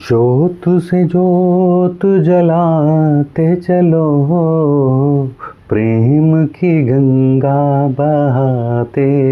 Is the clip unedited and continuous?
yes; 0 cuts

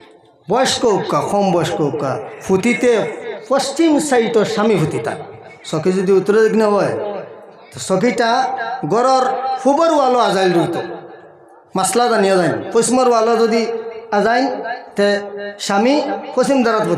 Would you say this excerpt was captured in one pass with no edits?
yes; 0 cuts

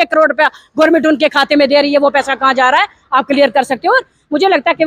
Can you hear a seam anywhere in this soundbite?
no; 0 cuts

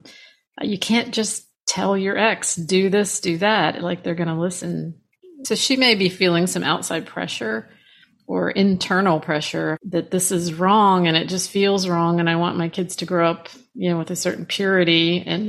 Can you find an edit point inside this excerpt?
yes; 2 cuts; at 5.4 s, 9.8 s

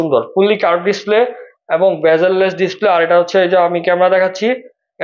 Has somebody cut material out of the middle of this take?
no; 0 cuts

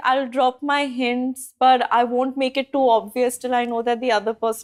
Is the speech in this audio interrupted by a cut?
no; 0 cuts

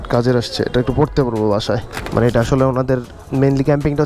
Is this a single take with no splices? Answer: yes; 0 cuts

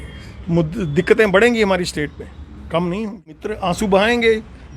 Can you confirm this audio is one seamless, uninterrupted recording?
no; 1 cut; at 3.5 s

